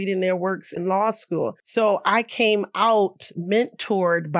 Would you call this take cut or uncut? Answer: cut